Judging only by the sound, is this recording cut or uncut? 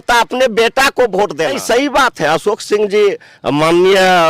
cut